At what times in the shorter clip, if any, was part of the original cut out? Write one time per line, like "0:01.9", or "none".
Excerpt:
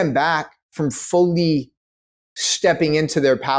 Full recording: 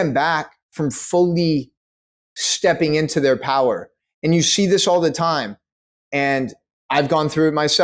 none